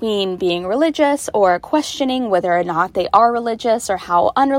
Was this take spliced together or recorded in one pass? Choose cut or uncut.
uncut